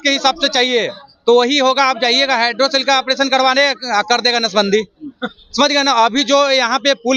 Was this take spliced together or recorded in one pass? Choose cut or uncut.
uncut